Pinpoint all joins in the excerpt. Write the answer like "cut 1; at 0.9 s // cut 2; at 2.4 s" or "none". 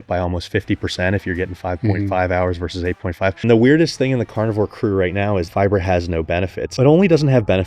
cut 1; at 3.4 s // cut 2; at 5.5 s // cut 3; at 6.7 s